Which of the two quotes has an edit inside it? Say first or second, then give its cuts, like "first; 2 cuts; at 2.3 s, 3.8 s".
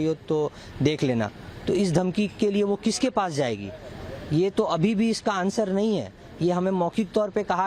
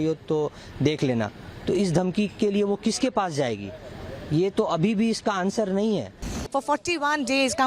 second; 1 cut; at 6.3 s